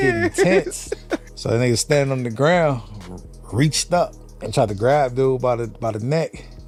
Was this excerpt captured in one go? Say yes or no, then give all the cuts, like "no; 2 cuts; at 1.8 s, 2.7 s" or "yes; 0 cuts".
yes; 0 cuts